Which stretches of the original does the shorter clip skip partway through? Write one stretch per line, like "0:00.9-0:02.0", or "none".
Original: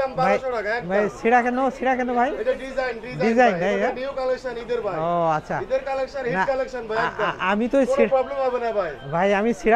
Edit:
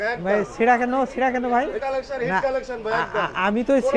0:02.4-0:05.8